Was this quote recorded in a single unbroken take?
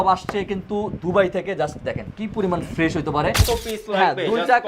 no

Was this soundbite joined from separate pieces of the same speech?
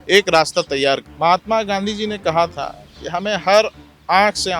yes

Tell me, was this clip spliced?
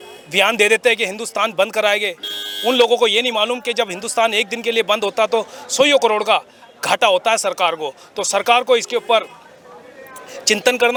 no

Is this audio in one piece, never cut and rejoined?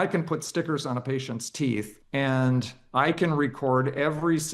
no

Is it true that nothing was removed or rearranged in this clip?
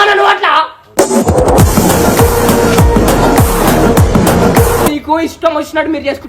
no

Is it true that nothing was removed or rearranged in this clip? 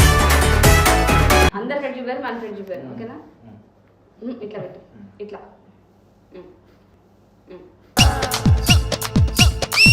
no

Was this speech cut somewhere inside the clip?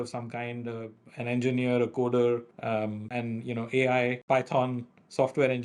yes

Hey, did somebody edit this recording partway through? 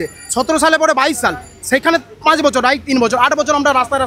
no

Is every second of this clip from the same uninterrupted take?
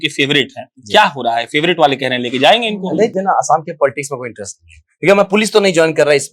no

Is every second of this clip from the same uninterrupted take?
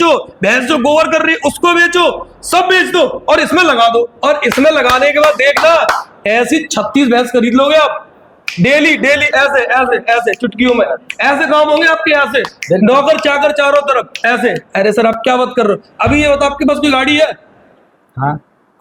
yes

